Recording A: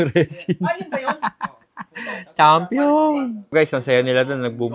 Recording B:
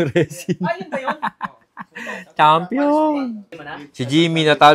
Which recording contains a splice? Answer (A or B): B